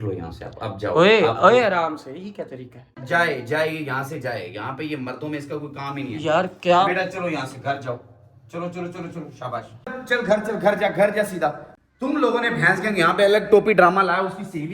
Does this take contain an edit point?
yes; 3 cuts; at 2.9 s, 10.0 s, 11.7 s

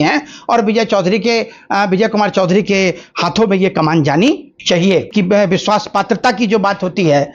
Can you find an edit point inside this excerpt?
yes; 1 cut; at 5.1 s

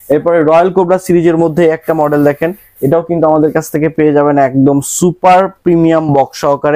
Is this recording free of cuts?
yes; 0 cuts

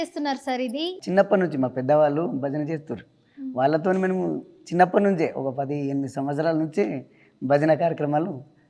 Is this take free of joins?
no; 1 cut; at 1.0 s

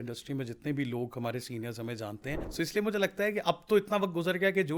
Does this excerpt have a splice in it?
yes; 1 cut; at 2.4 s

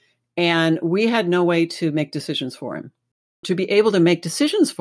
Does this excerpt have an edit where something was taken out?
yes; 1 cut; at 3.2 s

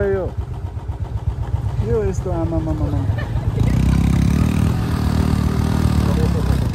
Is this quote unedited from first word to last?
yes; 0 cuts

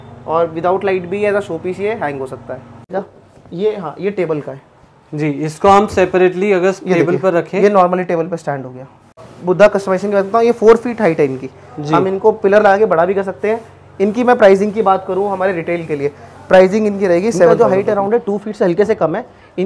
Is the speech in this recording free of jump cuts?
no; 3 cuts; at 2.9 s, 9.3 s, 17.5 s

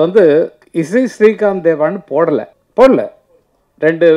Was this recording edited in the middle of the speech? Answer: yes; 1 cut; at 2.6 s

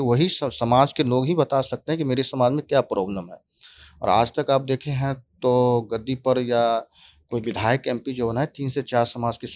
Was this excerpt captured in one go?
yes; 0 cuts

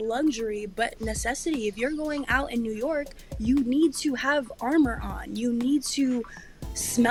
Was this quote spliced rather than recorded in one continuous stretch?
no; 0 cuts

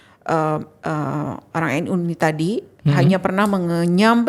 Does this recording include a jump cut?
no; 0 cuts

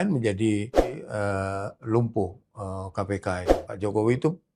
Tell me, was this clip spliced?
yes; 2 cuts; at 1.0 s, 3.6 s

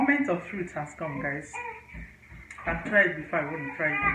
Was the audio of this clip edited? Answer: no; 0 cuts

